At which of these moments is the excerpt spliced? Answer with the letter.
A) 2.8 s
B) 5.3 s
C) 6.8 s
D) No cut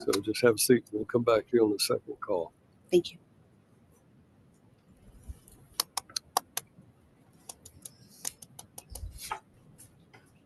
D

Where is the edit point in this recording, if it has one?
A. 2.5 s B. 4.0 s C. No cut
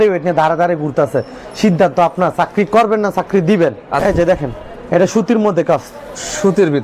B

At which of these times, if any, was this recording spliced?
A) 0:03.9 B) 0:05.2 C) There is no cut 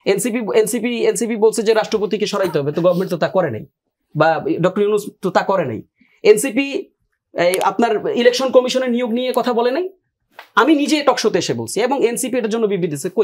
C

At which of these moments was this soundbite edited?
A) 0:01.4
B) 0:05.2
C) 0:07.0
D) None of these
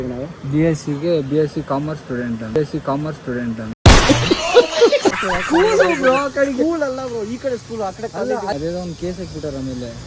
B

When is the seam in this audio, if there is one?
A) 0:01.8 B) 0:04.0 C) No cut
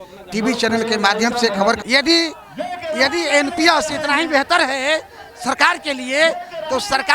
A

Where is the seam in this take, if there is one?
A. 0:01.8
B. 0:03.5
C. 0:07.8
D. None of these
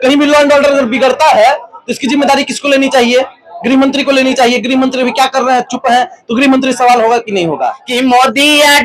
C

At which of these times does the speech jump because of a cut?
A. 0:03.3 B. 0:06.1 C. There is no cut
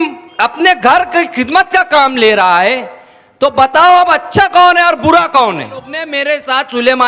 B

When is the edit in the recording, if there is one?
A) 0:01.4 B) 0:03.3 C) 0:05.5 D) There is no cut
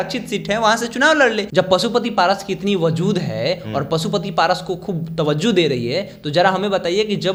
D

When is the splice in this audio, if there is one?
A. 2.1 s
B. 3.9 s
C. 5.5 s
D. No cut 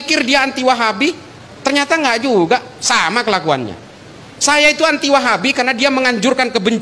D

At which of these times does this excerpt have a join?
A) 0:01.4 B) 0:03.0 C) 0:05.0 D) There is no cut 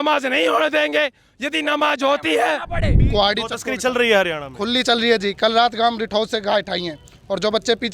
B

